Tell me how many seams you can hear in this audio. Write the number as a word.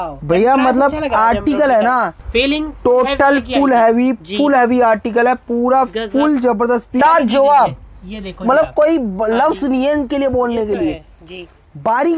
two